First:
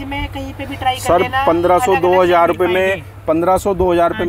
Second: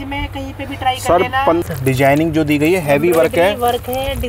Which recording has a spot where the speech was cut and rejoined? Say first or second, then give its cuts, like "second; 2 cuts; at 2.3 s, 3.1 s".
second; 1 cut; at 1.6 s